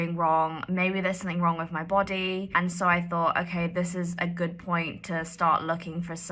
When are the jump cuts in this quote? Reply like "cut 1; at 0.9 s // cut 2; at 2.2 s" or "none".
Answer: cut 1; at 2.5 s